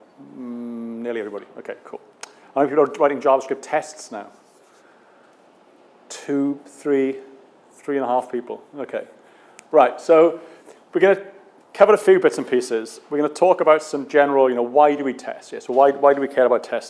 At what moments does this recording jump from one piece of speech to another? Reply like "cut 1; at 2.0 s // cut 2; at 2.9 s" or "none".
cut 1; at 15.0 s